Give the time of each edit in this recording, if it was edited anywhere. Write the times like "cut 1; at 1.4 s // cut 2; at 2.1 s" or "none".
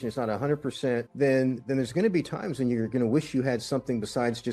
cut 1; at 1.1 s